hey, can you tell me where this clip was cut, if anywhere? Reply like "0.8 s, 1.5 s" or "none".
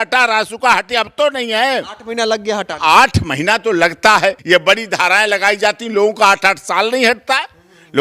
4.4 s